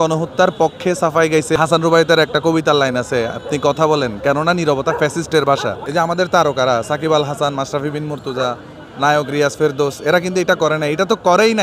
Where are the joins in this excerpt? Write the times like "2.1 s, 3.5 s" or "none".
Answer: 1.6 s, 5.8 s